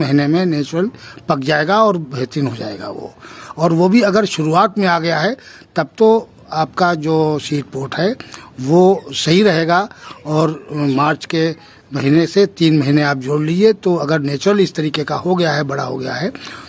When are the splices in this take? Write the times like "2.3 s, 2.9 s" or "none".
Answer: none